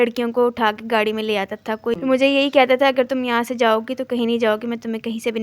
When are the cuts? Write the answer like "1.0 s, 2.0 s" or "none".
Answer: 2.0 s